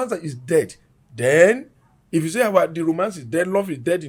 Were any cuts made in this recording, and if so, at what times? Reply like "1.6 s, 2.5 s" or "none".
none